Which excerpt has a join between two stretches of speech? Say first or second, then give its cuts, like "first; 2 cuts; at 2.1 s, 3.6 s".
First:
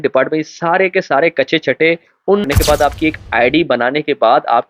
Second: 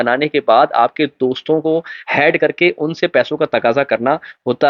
first; 1 cut; at 2.5 s